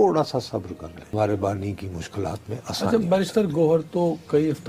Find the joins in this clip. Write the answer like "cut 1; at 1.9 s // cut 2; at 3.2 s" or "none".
cut 1; at 1.1 s